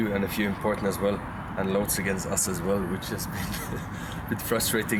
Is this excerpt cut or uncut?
uncut